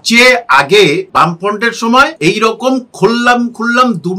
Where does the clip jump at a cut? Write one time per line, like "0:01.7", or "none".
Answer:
0:01.1
0:02.1

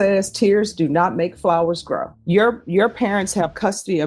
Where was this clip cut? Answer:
0:02.1

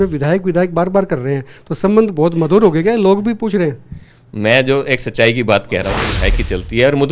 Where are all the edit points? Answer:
0:06.1

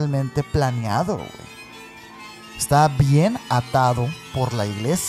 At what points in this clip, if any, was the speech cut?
none

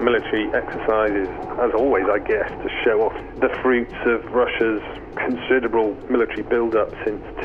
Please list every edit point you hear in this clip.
0:01.4
0:03.2
0:06.0

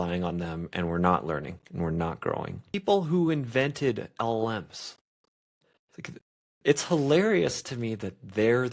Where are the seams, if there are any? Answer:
0:02.7

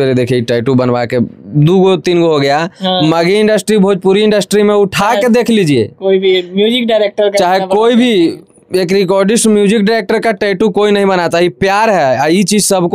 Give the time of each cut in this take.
none

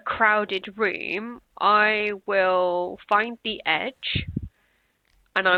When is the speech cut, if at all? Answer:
none

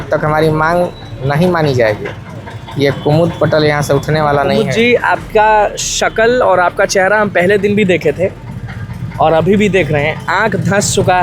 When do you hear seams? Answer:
none

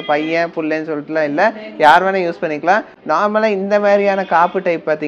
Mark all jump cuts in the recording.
none

